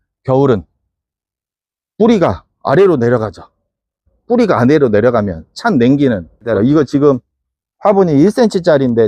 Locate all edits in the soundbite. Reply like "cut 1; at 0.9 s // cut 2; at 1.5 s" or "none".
cut 1; at 6.5 s